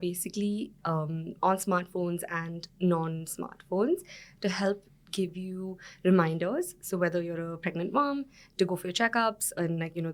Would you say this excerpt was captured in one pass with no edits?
yes; 0 cuts

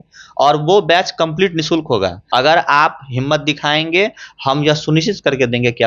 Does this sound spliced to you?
yes; 1 cut; at 2.2 s

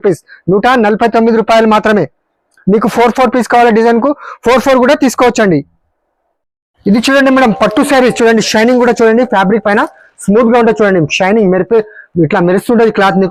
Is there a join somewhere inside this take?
no; 0 cuts

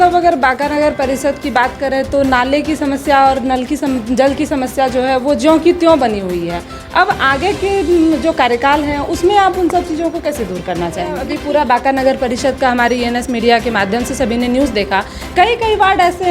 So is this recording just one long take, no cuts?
no; 1 cut; at 11.3 s

